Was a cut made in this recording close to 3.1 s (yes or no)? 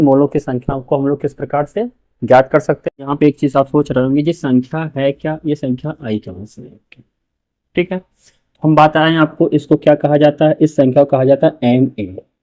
yes